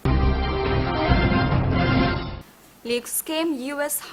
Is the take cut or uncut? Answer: uncut